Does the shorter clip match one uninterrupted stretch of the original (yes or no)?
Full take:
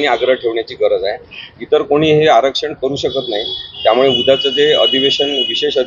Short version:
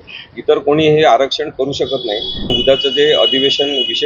no